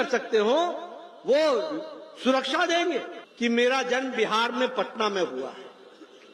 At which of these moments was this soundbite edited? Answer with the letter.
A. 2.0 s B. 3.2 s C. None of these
B